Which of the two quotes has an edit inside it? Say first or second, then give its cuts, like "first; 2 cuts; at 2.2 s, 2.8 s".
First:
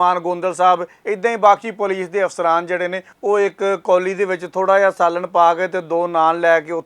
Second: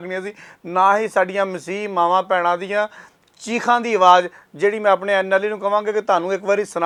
first; 2 cuts; at 0.9 s, 3.1 s